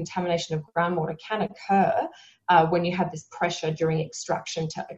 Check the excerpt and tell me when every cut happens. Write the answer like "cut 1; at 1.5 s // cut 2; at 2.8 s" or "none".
none